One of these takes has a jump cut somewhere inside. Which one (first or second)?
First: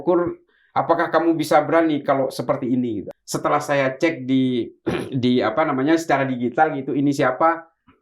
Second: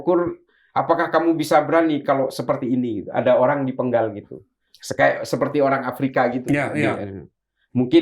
first